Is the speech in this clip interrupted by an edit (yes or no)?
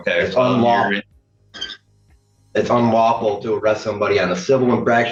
no